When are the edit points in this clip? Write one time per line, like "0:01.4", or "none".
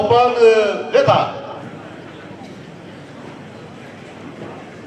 0:01.6